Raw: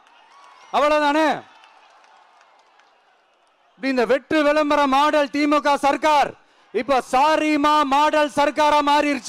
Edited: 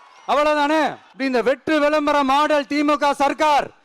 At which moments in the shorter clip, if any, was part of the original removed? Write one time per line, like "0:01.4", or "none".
0:01.1